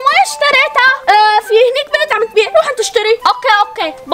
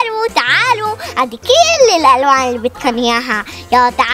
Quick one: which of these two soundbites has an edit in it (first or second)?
first